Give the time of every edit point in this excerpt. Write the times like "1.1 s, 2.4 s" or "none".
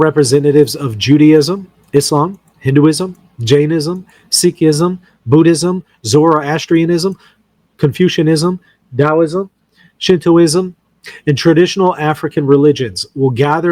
none